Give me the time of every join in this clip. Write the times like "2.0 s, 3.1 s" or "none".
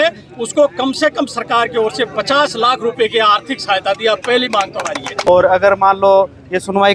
5.3 s